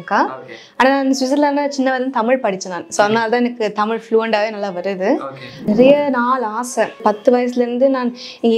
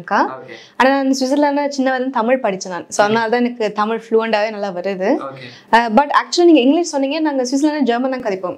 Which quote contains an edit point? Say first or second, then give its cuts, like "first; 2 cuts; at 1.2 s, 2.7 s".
first; 2 cuts; at 5.7 s, 7.0 s